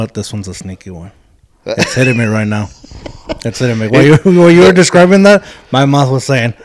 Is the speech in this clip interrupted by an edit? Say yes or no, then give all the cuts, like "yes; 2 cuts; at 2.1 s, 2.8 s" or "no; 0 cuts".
no; 0 cuts